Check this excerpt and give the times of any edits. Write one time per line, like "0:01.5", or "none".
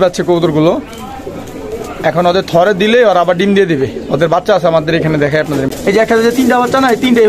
none